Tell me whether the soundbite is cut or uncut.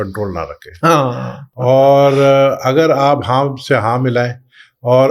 uncut